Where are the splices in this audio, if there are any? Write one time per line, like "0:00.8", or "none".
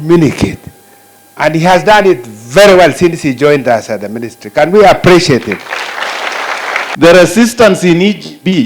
0:06.9